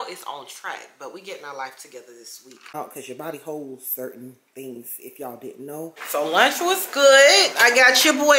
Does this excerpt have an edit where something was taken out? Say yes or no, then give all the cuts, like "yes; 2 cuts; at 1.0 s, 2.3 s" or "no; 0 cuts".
yes; 2 cuts; at 2.8 s, 6.0 s